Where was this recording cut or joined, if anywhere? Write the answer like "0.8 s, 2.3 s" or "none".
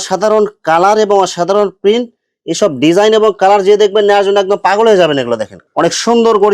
5.6 s